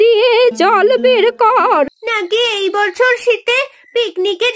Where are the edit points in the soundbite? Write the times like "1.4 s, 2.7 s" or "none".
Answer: 2.0 s